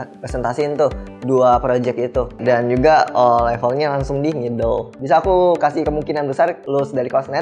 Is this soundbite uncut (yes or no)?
no